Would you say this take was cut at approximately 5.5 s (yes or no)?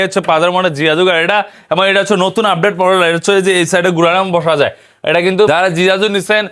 yes